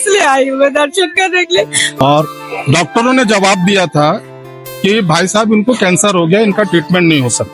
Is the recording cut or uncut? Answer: cut